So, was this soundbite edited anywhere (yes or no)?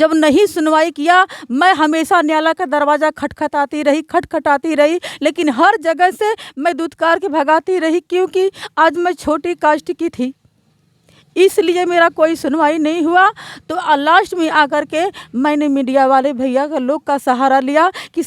no